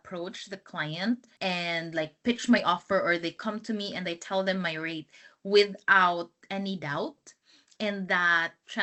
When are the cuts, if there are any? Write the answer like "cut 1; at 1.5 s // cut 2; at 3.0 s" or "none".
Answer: none